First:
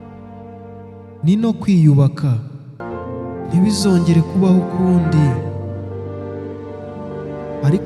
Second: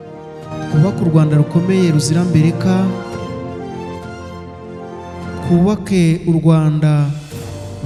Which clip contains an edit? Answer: first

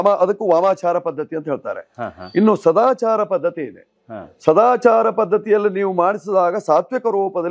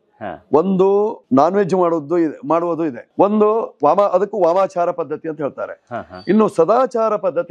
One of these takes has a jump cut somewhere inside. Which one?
second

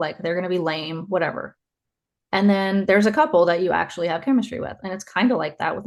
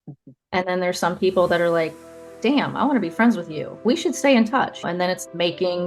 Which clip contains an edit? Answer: second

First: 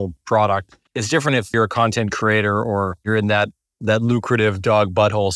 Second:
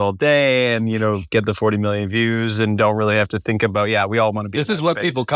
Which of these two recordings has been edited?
first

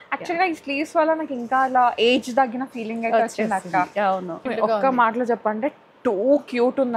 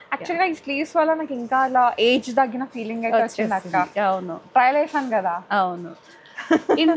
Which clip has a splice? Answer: first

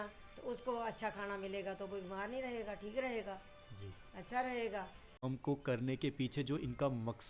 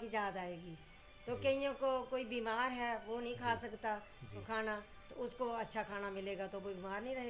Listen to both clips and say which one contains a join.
first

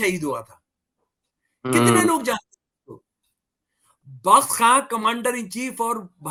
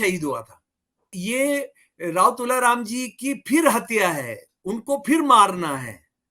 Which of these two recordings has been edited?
second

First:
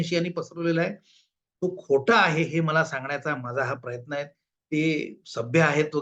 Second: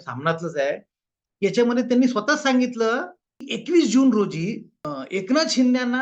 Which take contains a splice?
second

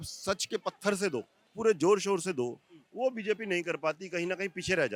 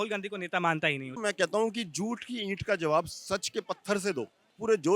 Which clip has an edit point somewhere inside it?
second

